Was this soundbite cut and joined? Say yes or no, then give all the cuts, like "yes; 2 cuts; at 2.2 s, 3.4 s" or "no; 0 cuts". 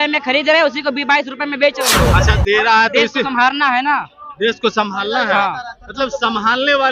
yes; 1 cut; at 1.9 s